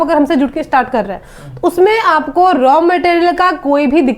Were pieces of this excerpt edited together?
no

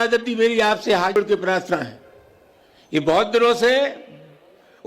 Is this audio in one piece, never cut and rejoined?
no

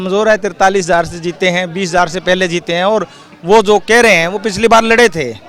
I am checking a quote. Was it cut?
no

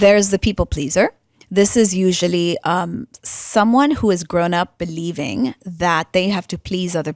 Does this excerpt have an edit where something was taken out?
no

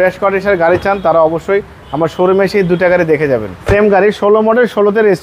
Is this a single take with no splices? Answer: no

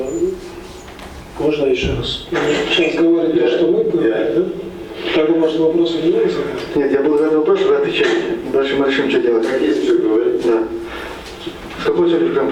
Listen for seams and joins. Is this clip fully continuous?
yes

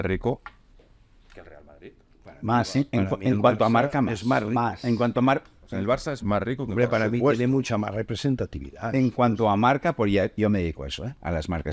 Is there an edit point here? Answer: no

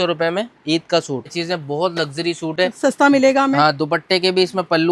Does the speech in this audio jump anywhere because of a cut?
yes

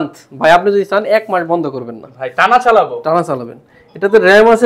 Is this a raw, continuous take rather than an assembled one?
yes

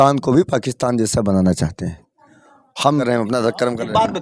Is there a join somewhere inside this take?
yes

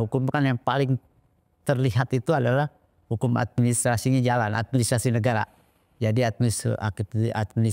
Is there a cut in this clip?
no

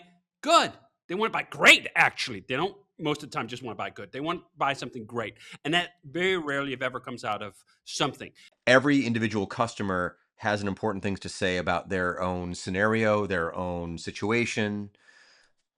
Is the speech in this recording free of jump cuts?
no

